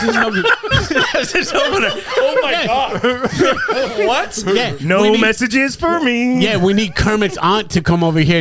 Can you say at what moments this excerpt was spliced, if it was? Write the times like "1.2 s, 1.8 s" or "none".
none